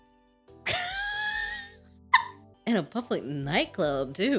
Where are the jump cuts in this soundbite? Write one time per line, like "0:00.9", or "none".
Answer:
0:02.4